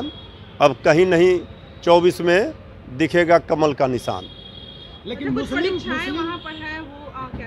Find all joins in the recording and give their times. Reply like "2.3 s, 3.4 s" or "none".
none